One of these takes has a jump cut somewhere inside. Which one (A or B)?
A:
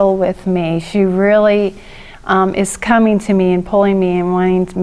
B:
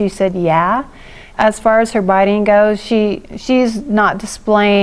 B